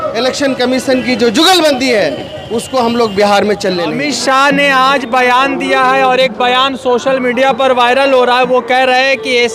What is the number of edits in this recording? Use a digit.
0